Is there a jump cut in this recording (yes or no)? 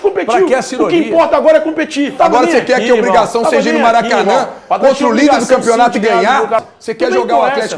yes